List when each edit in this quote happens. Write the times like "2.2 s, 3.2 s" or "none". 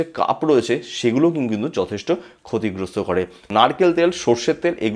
3.5 s